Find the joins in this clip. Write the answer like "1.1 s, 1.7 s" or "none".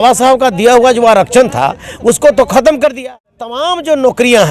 3.4 s